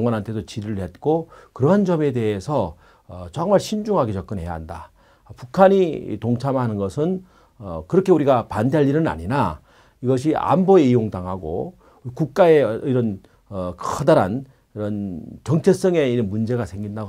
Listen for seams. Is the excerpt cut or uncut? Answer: cut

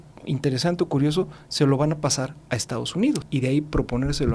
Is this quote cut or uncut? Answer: cut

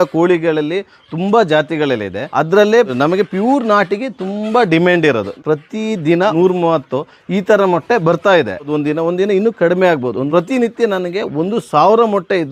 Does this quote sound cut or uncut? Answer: uncut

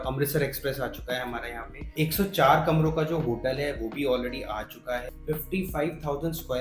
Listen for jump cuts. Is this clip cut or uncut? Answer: cut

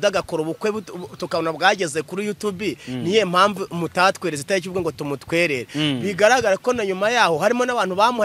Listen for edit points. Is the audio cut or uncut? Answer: uncut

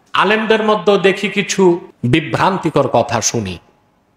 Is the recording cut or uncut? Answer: cut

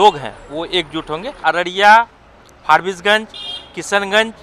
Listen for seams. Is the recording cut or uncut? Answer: cut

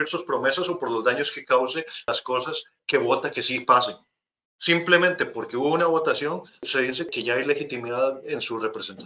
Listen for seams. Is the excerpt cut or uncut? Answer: cut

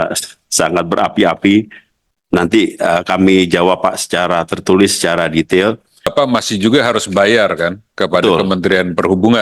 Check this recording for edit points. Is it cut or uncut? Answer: cut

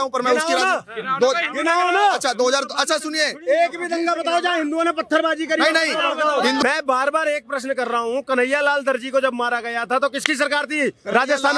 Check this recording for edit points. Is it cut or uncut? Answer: cut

